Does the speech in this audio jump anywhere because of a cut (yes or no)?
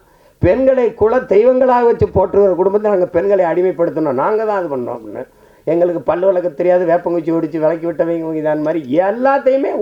no